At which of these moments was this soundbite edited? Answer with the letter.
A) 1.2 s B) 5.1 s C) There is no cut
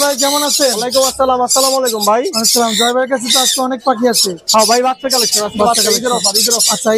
C